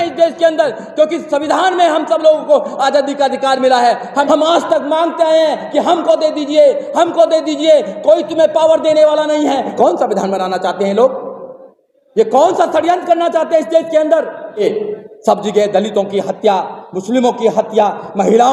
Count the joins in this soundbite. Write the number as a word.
three